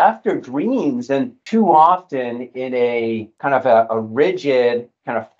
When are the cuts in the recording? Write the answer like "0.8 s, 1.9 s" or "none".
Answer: 1.4 s, 3.3 s